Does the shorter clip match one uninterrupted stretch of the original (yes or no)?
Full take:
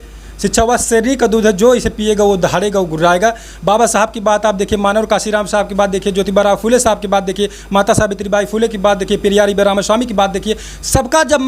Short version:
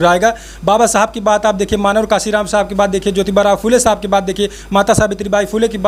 yes